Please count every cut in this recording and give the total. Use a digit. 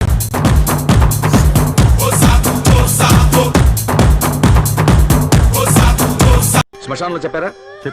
1